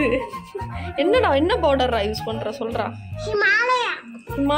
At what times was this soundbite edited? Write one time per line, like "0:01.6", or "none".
none